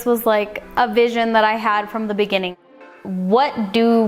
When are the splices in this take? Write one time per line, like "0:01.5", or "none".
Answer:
0:02.8